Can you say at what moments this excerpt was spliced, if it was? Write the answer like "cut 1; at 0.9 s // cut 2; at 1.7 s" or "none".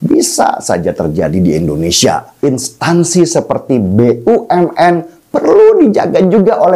cut 1; at 2.3 s